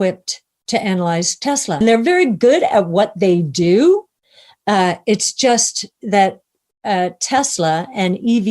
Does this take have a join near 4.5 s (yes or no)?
no